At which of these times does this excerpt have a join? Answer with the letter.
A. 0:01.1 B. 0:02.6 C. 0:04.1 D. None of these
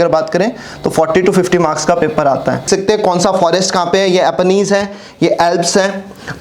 B